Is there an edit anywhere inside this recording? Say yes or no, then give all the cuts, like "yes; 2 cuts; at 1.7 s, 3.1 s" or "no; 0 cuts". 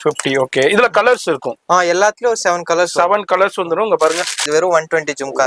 yes; 1 cut; at 4.4 s